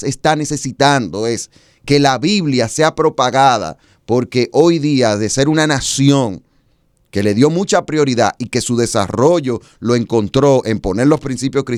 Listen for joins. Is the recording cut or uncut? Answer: uncut